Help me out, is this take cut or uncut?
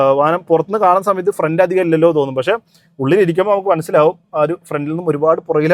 uncut